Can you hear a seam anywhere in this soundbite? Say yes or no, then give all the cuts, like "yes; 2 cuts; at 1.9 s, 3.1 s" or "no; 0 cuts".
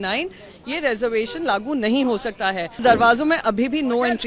yes; 1 cut; at 2.8 s